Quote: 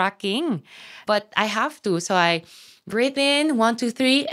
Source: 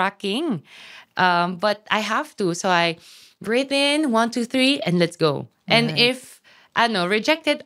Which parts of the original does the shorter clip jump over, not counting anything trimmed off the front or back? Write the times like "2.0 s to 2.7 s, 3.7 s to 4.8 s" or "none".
1.0 s to 1.5 s

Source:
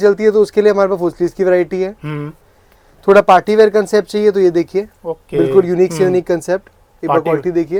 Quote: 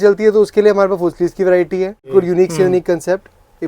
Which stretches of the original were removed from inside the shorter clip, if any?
2.1 s to 5.5 s

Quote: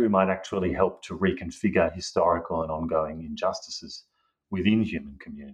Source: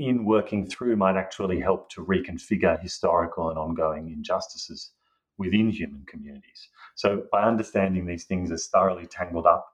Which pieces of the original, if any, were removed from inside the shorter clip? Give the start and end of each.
none

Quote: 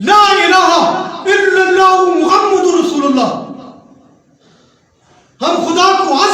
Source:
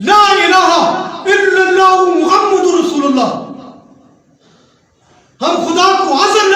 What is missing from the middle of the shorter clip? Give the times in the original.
none

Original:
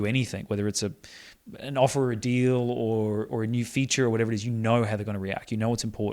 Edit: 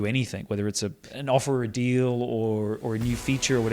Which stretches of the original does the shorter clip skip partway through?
1.1 s to 1.6 s

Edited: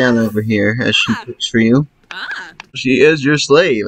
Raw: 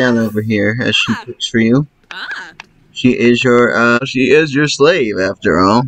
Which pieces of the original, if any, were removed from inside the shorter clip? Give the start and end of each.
2.8 s to 4.1 s

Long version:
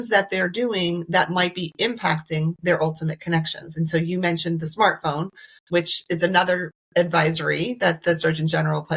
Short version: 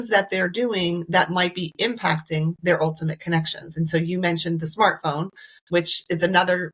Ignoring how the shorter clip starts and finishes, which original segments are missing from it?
none

